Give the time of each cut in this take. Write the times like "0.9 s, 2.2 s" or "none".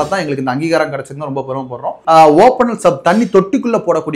2.0 s